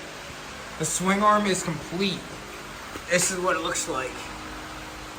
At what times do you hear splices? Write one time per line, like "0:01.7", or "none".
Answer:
none